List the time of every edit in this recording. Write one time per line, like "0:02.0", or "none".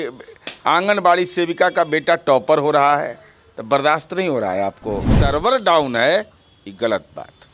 0:05.2